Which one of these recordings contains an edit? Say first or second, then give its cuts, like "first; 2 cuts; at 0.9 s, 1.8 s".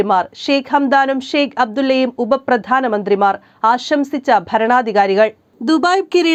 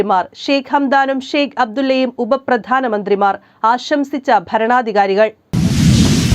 second; 1 cut; at 5.4 s